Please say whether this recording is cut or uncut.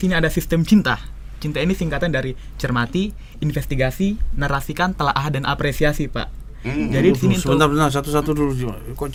uncut